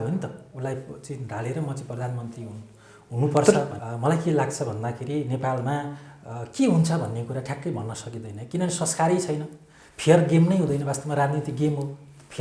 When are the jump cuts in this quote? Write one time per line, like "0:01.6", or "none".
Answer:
0:03.7